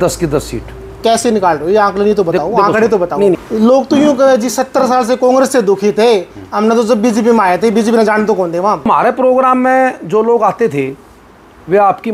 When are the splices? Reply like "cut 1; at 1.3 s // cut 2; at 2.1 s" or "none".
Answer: cut 1; at 3.4 s // cut 2; at 8.9 s

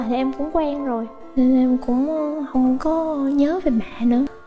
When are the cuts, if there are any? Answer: none

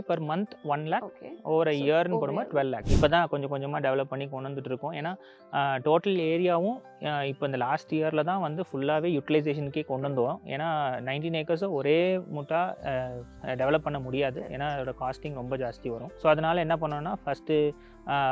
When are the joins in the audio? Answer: cut 1; at 2.8 s

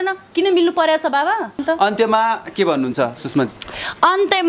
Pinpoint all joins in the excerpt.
none

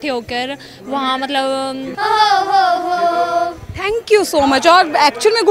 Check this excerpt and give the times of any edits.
cut 1; at 1.9 s

